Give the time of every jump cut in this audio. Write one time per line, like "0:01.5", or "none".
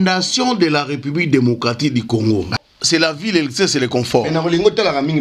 0:02.5